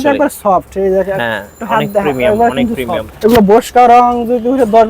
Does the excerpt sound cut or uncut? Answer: cut